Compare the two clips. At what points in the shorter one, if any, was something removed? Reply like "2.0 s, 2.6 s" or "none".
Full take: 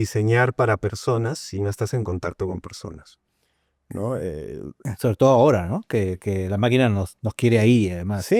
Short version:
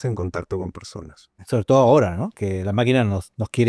1.3 s, 2.3 s